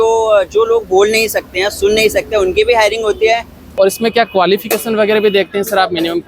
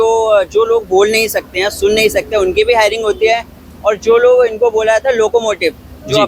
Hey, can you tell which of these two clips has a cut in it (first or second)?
first